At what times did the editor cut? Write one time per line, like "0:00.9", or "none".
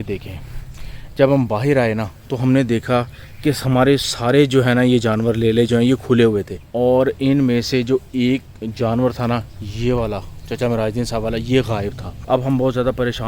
0:06.6
0:12.1